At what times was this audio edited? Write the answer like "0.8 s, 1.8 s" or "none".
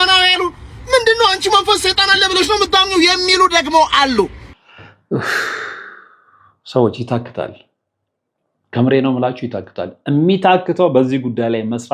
4.5 s